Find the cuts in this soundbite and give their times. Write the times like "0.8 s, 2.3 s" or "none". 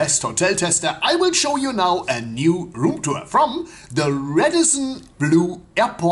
none

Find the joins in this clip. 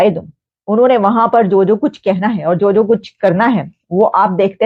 none

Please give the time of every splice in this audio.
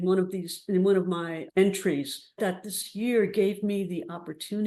1.4 s, 2.4 s

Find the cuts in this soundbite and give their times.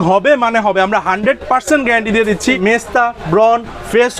2.6 s

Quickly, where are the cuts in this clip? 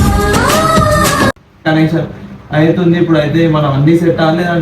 1.6 s

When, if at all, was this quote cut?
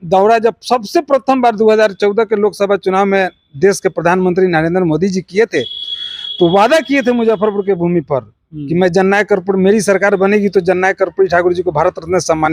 none

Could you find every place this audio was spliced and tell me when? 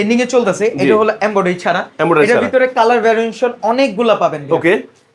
none

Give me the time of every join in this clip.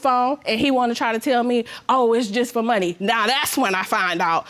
3.2 s

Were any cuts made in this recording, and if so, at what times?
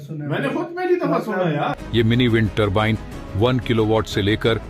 1.8 s

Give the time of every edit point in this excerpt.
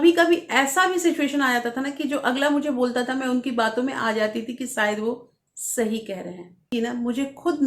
6.7 s

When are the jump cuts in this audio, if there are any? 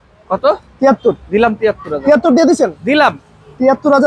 none

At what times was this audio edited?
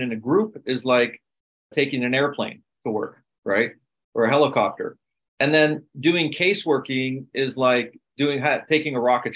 1.8 s

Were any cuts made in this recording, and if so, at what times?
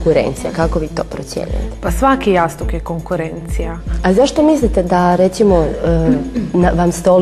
none

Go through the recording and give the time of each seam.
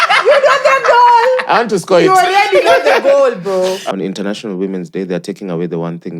3.8 s

